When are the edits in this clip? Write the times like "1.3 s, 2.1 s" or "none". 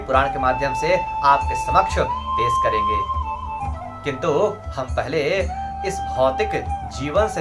none